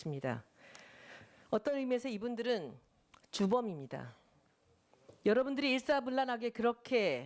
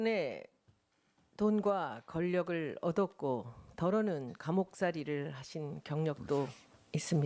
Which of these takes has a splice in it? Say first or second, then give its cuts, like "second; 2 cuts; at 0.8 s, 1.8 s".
first; 1 cut; at 4.4 s